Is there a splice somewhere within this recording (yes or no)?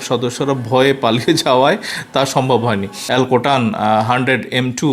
yes